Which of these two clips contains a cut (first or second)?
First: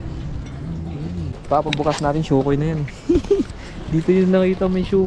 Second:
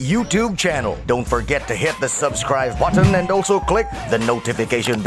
first